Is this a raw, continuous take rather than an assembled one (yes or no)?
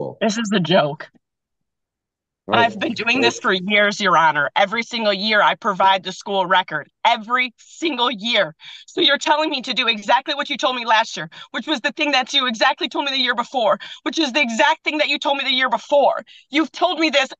yes